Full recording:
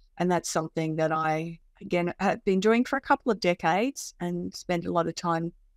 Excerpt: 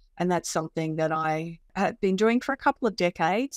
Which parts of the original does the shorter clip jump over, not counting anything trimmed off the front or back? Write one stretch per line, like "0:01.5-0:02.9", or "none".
0:01.7-0:02.1